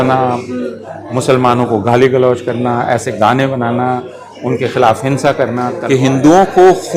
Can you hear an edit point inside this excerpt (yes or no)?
yes